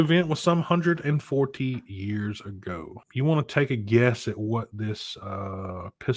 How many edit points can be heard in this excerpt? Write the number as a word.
one